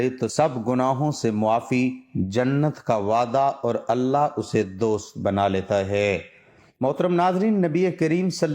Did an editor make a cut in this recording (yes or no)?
yes